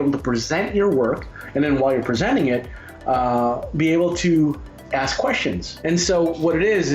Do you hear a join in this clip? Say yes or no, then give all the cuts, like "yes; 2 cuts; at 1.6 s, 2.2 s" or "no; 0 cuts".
yes; 1 cut; at 5.7 s